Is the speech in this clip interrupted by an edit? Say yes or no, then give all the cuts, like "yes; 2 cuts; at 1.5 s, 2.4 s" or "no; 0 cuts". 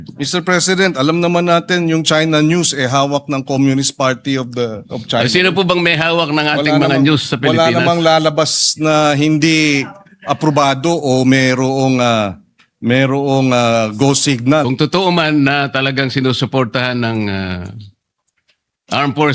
yes; 1 cut; at 14.6 s